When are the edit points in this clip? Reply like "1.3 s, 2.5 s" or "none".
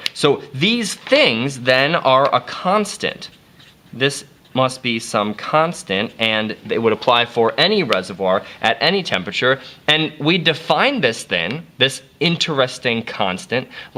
none